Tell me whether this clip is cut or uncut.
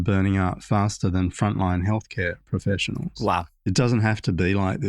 cut